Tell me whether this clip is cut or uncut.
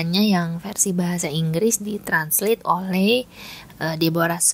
uncut